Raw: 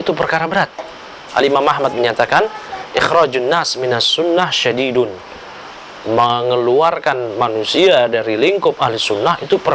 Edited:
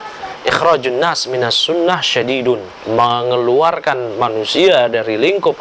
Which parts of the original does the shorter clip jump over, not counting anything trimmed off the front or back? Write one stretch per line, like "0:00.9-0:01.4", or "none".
0:05.2-0:05.9